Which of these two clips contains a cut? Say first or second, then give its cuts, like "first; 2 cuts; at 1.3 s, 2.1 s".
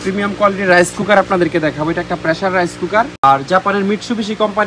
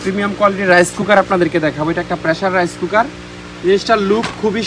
first; 1 cut; at 3.2 s